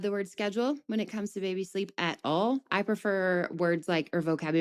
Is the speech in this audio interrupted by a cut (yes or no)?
no